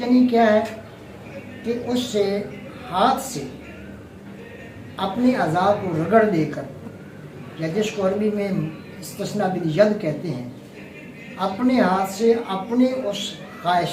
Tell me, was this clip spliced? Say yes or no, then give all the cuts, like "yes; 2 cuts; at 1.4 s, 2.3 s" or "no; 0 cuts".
no; 0 cuts